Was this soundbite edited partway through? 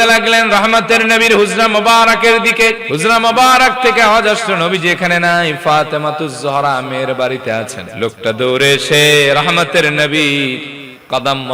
yes; 2 cuts; at 2.8 s, 7.8 s

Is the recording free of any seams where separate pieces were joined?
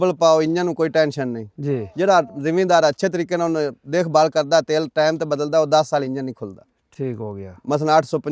yes; 0 cuts

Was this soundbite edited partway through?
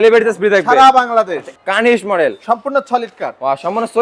yes; 1 cut; at 1.5 s

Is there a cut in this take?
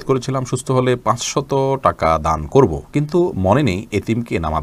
no; 0 cuts

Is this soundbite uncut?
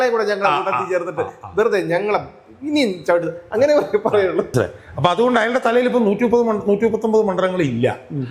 no; 1 cut; at 4.5 s

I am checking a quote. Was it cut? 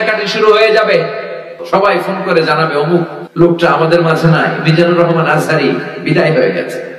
yes; 2 cuts; at 1.5 s, 3.2 s

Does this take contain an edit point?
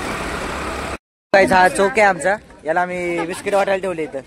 yes; 1 cut; at 0.9 s

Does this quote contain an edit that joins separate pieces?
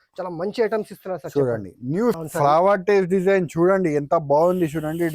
yes; 1 cut; at 2.2 s

